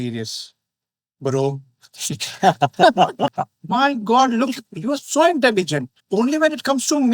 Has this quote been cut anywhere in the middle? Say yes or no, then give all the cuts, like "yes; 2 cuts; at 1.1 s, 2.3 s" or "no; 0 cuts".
yes; 1 cut; at 3.3 s